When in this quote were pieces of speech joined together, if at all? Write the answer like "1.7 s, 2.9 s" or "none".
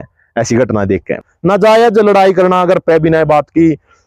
1.3 s